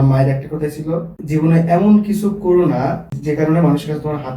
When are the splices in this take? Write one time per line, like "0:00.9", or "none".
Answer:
0:01.2
0:03.1

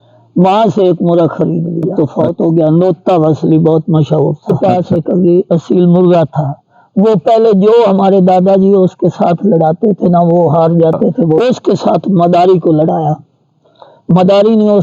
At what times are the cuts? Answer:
0:01.9
0:04.5
0:11.4

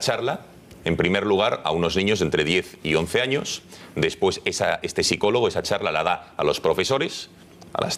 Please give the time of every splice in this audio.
none

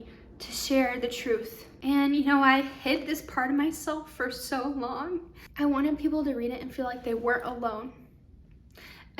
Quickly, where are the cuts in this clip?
0:01.7
0:05.4

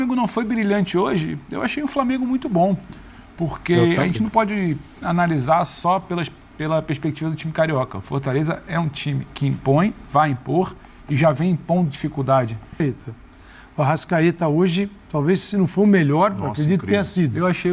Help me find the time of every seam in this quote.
0:12.8

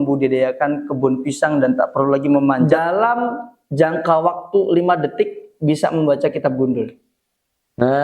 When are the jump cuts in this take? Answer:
0:02.7

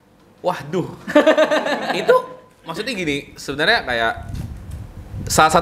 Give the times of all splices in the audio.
none

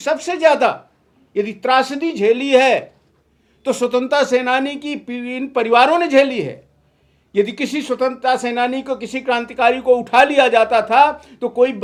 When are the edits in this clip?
none

